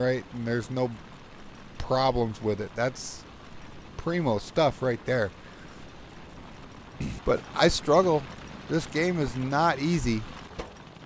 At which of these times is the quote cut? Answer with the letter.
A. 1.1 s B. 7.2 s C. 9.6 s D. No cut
B